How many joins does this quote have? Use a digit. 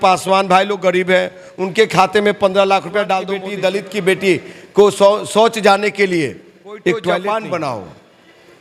2